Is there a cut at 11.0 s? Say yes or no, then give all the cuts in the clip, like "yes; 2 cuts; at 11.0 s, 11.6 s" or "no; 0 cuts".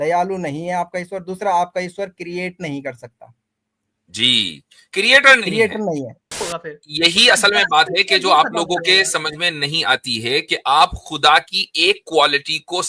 no; 1 cut; at 6.5 s